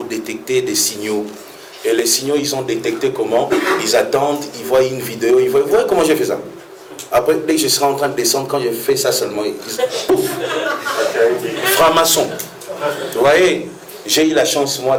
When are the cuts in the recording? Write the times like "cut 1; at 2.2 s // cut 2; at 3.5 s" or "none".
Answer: none